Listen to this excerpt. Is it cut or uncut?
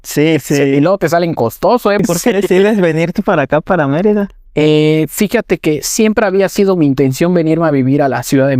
cut